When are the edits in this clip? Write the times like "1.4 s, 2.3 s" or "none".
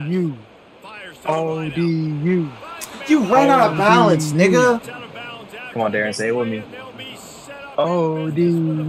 none